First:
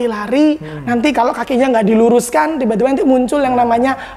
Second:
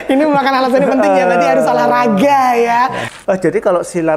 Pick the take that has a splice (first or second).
second